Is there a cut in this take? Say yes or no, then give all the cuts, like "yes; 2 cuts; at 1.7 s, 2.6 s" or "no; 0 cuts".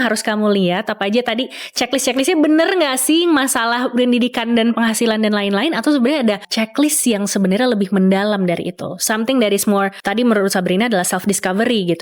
yes; 2 cuts; at 6.5 s, 10.0 s